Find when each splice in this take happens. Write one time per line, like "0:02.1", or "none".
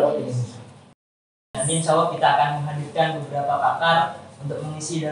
0:01.1